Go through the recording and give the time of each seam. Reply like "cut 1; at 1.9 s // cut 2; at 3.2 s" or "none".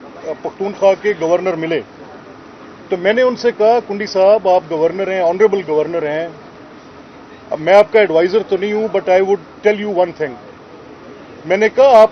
none